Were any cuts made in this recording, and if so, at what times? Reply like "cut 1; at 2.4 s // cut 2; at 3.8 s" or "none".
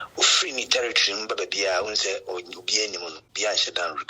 cut 1; at 3.2 s